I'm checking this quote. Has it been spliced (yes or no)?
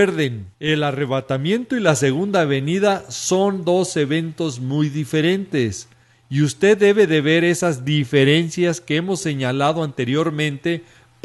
yes